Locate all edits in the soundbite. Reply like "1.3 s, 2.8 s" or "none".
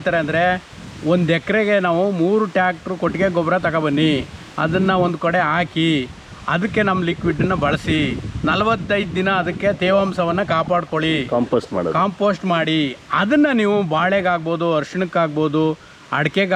none